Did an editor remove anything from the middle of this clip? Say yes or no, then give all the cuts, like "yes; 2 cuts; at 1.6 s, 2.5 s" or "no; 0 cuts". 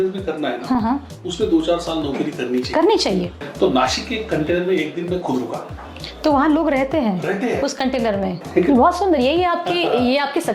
yes; 2 cuts; at 3.4 s, 8.4 s